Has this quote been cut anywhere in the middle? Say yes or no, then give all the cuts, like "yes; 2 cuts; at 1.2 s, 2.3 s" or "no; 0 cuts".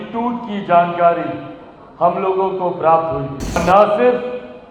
yes; 1 cut; at 3.6 s